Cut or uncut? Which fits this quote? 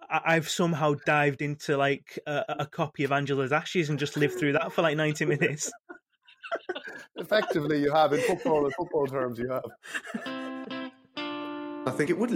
cut